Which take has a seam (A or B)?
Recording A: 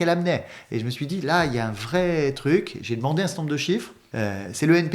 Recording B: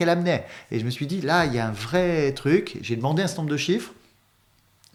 A